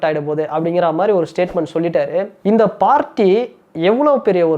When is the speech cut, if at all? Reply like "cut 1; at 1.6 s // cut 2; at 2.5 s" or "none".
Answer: cut 1; at 2.3 s